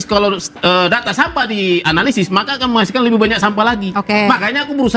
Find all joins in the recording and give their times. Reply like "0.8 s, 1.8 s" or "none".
none